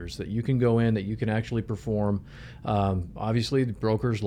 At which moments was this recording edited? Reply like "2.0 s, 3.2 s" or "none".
none

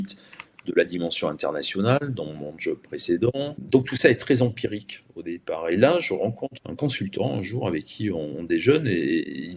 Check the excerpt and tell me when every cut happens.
3.6 s, 6.6 s

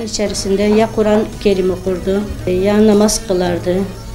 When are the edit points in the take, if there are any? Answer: 2.5 s

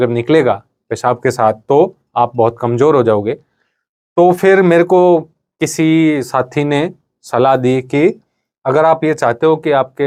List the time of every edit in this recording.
none

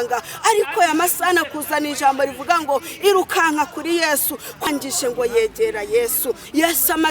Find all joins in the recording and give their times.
4.6 s

